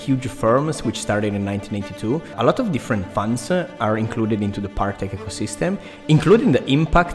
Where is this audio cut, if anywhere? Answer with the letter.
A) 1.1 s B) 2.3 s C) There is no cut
B